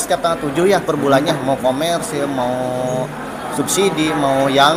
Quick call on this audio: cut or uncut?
uncut